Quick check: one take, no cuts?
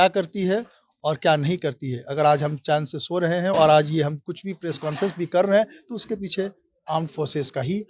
yes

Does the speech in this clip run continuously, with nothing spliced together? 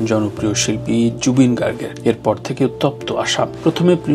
yes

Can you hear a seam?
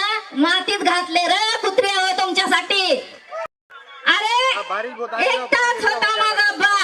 yes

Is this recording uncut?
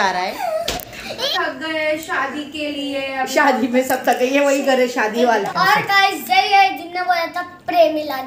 no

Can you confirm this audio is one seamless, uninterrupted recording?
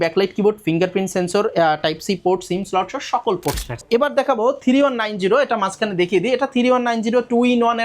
no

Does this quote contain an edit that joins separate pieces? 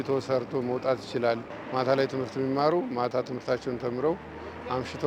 yes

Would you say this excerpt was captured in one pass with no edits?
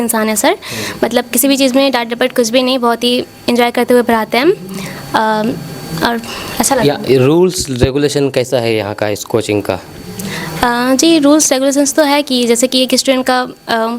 yes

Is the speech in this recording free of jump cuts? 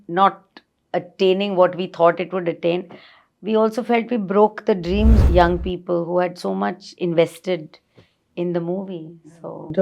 no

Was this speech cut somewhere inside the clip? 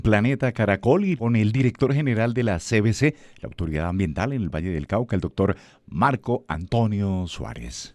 yes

